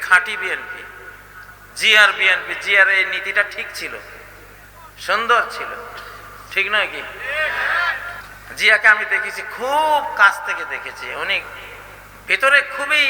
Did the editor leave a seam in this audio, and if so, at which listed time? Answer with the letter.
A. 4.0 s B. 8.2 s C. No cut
B